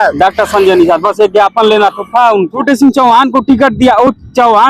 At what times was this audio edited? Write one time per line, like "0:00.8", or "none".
0:02.6